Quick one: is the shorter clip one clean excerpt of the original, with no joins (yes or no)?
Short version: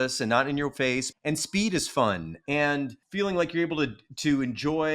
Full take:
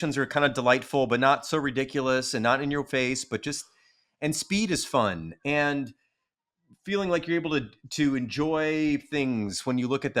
no